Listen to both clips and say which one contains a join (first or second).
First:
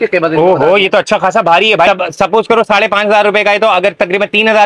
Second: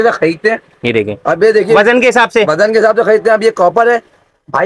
first